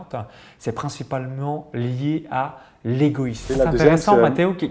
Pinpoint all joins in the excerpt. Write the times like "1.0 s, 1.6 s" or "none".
3.5 s